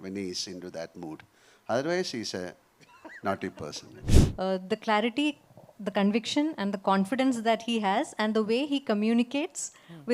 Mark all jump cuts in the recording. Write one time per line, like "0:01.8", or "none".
0:04.0